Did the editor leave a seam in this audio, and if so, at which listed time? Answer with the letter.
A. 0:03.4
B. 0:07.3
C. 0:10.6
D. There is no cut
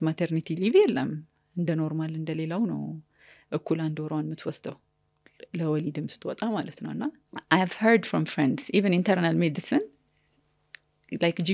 B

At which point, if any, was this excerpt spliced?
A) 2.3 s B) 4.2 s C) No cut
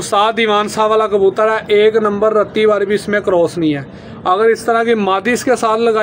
C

